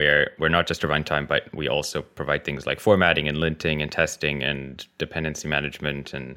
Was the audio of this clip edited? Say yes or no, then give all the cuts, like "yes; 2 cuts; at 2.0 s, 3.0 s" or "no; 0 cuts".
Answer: no; 0 cuts